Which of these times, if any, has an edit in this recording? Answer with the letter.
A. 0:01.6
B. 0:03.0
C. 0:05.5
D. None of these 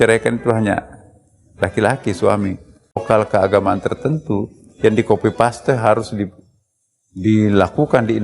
B